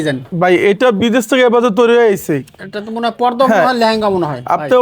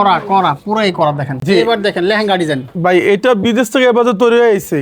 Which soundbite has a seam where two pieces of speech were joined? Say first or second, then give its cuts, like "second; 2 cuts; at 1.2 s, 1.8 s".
second; 1 cut; at 1.4 s